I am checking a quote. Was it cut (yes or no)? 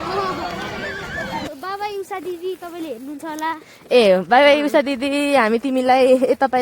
yes